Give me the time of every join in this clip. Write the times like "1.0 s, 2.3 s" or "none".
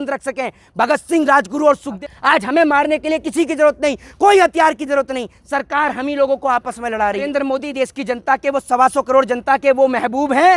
2.0 s, 7.5 s